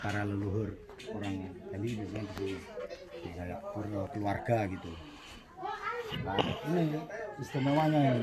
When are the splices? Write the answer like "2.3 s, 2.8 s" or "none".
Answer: none